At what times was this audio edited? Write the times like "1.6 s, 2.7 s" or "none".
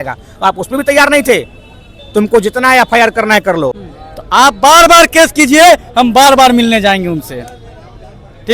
3.8 s